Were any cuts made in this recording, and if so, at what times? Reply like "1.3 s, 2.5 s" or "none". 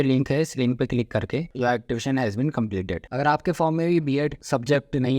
1.5 s, 3.0 s

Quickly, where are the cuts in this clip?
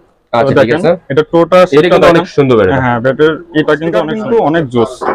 4.1 s

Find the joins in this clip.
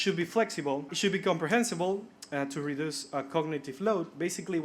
0.9 s

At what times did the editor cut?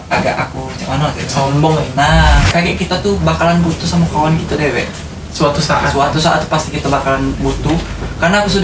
2.5 s

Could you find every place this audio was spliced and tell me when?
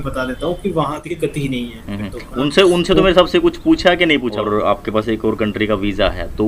1.1 s, 4.3 s

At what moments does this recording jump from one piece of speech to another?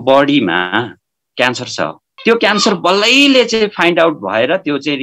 2.1 s

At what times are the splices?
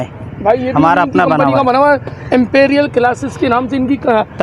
none

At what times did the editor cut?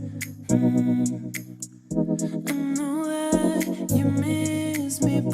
3.8 s

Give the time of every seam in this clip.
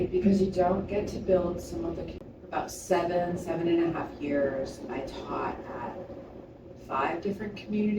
2.1 s

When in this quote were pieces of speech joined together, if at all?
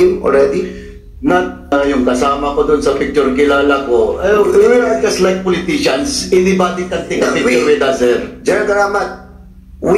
1.7 s

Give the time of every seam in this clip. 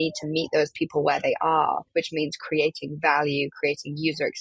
1.8 s

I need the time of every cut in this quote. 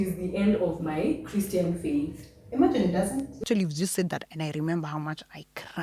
3.4 s

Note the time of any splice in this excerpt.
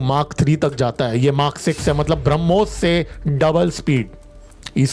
none

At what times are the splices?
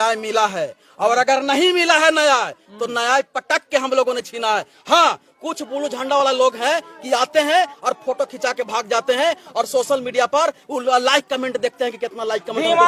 none

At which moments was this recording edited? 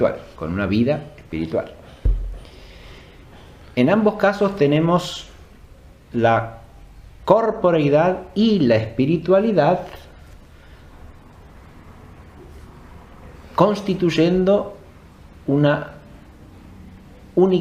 none

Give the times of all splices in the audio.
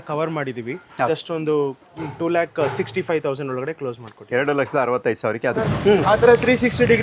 1.1 s, 5.6 s

